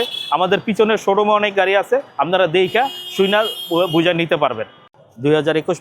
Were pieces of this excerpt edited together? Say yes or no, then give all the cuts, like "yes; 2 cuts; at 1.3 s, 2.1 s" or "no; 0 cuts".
yes; 1 cut; at 4.8 s